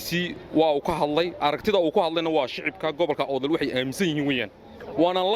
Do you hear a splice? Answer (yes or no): no